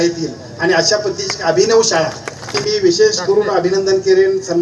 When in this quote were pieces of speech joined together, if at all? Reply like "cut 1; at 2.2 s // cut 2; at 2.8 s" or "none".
cut 1; at 2.6 s